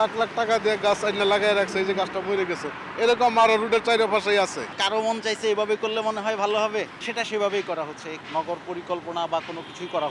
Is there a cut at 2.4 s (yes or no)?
no